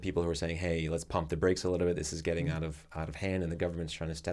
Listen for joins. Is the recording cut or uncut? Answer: uncut